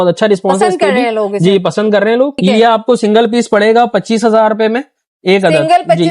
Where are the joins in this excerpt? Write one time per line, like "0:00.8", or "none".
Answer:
0:02.4